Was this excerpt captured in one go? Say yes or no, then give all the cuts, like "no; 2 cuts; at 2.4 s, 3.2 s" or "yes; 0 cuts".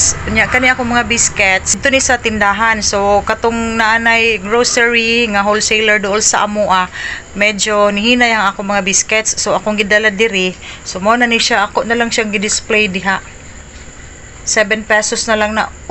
no; 1 cut; at 1.8 s